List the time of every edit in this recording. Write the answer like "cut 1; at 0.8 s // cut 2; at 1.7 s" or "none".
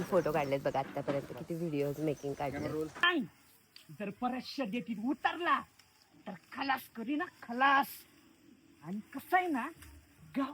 cut 1; at 3.0 s